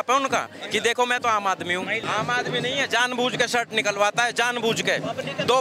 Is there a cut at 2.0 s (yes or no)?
yes